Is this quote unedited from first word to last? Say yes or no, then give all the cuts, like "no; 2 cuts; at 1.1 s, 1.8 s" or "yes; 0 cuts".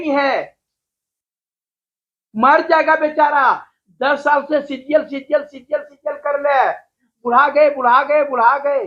yes; 0 cuts